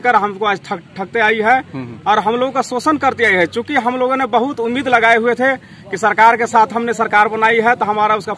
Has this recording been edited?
no; 0 cuts

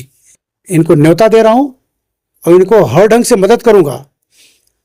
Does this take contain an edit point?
no; 0 cuts

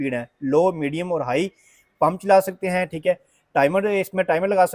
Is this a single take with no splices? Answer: yes; 0 cuts

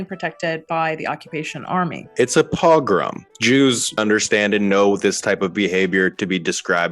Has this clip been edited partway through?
yes; 2 cuts; at 2.1 s, 4.0 s

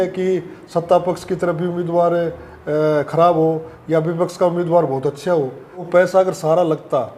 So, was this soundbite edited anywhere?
yes; 1 cut; at 5.9 s

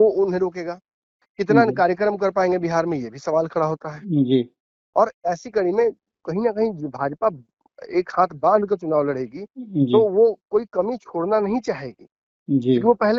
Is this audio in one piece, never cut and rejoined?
yes; 0 cuts

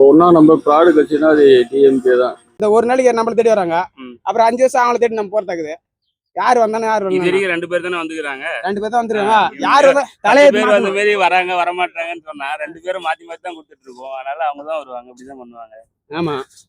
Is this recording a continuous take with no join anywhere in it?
no; 1 cut; at 2.6 s

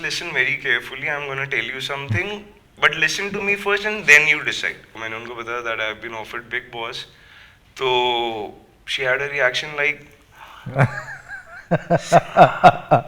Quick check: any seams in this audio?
yes; 1 cut; at 5.0 s

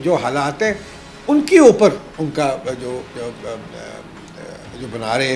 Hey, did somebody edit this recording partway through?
no; 0 cuts

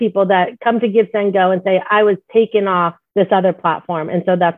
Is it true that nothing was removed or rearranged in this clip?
no; 1 cut; at 3.0 s

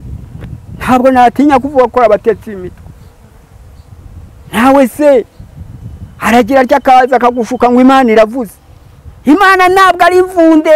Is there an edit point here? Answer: no; 0 cuts

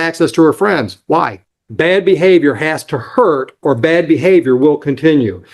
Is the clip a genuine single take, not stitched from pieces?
no; 1 cut; at 1.6 s

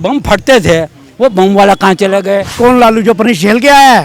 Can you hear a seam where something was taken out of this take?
yes; 1 cut; at 2.5 s

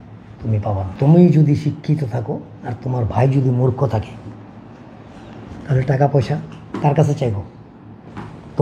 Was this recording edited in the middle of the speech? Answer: yes; 1 cut; at 0.9 s

